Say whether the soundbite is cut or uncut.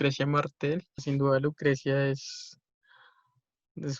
cut